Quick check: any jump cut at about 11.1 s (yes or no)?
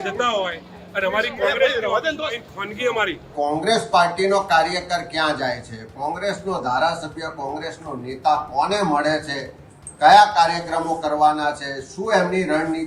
no